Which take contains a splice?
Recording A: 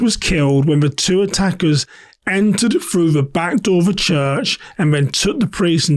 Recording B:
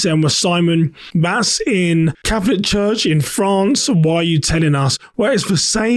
B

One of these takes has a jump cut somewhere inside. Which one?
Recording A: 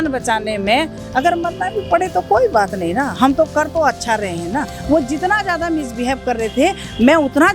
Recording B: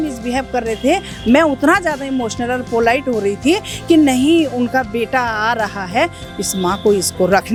A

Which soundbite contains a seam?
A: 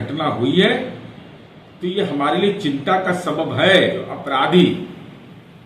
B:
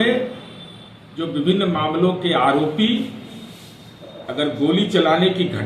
A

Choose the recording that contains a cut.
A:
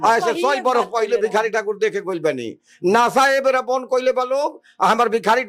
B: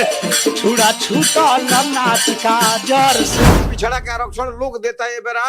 B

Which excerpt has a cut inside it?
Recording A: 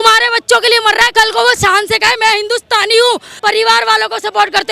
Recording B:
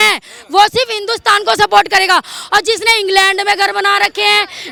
A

